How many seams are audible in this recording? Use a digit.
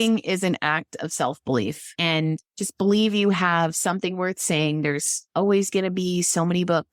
0